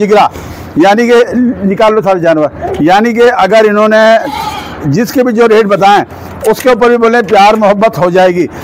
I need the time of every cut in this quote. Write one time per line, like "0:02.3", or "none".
none